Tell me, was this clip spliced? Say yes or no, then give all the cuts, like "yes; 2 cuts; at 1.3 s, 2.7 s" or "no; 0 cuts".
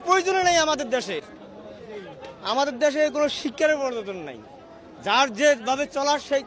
no; 0 cuts